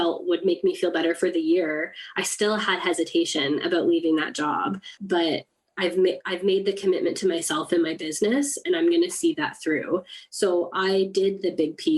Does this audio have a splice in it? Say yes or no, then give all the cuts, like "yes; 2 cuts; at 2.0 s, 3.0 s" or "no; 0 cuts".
yes; 1 cut; at 5.0 s